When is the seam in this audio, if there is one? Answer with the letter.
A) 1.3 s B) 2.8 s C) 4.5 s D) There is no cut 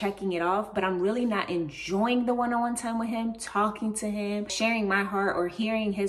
C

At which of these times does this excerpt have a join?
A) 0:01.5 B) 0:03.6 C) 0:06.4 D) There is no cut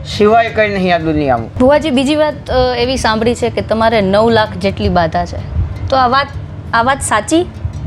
A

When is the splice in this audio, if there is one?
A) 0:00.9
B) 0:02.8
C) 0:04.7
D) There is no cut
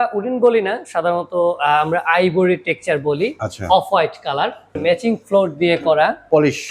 C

